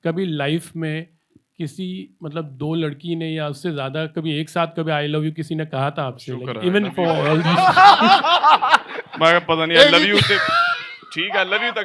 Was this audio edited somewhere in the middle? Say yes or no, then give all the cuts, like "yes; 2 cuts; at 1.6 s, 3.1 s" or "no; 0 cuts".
no; 0 cuts